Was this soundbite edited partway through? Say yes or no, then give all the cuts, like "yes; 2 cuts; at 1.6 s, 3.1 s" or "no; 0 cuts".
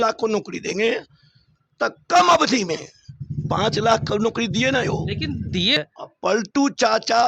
yes; 1 cut; at 5.8 s